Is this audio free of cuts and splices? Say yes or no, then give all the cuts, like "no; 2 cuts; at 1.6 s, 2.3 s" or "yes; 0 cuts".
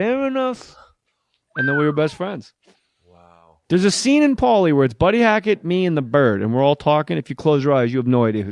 yes; 0 cuts